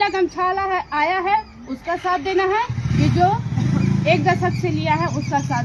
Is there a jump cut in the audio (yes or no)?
no